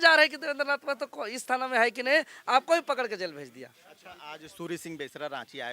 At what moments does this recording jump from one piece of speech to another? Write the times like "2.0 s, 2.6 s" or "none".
none